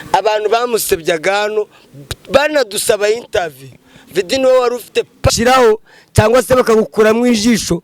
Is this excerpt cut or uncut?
cut